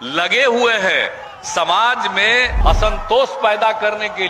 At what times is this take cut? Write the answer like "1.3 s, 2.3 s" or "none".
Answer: 2.5 s